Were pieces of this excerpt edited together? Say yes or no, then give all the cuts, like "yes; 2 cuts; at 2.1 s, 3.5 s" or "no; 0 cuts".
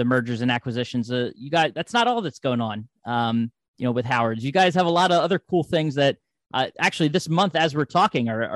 no; 0 cuts